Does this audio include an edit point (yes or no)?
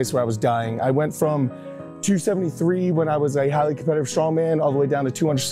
no